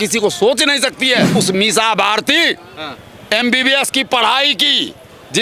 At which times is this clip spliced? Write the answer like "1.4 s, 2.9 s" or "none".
1.4 s